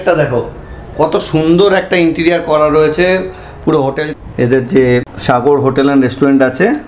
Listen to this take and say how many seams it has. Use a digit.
2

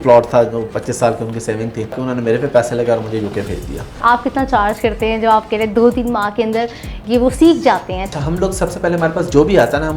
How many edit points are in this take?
3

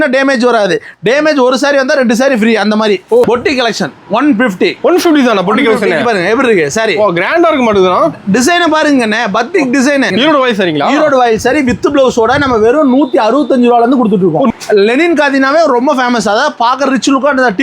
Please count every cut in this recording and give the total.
3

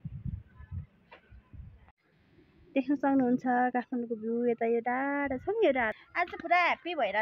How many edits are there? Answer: 1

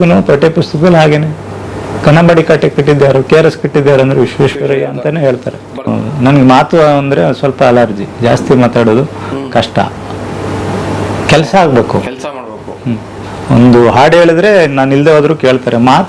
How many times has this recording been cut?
1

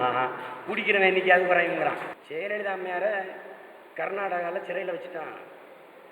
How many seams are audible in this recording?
1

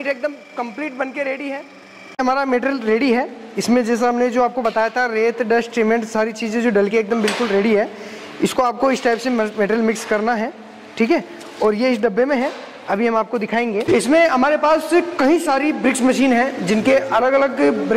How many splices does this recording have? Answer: 2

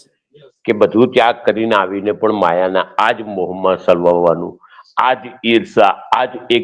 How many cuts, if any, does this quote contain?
0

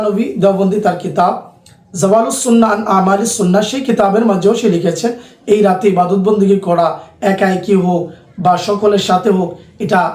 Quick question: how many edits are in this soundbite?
0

